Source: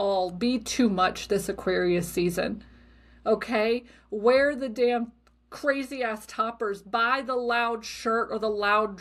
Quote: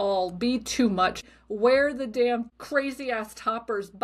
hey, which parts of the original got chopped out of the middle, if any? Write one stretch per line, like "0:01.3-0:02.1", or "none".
0:01.2-0:03.8
0:05.2-0:05.5